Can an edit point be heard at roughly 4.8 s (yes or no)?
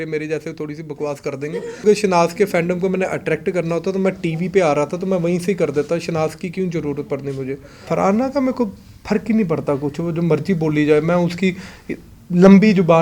no